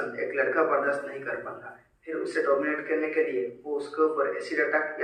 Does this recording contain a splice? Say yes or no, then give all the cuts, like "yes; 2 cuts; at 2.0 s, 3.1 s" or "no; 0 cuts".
no; 0 cuts